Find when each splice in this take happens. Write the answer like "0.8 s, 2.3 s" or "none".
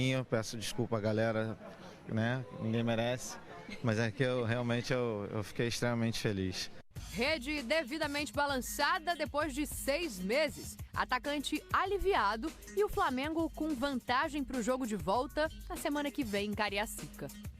none